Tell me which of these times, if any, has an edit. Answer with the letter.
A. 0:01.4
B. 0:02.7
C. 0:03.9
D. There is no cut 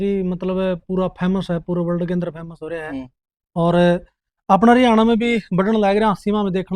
D